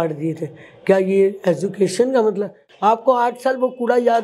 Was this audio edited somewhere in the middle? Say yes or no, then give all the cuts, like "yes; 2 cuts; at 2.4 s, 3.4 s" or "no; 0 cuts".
yes; 1 cut; at 2.6 s